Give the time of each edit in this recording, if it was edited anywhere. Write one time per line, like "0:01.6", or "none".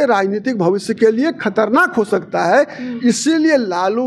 none